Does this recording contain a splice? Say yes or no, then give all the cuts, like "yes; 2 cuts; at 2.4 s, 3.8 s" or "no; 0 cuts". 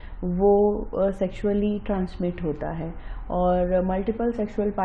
no; 0 cuts